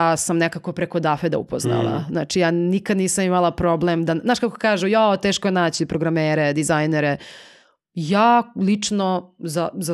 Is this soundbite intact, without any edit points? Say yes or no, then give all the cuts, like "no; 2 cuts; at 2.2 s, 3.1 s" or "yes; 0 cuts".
yes; 0 cuts